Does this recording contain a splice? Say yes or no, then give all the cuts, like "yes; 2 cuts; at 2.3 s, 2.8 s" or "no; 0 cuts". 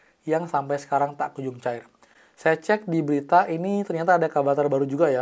no; 0 cuts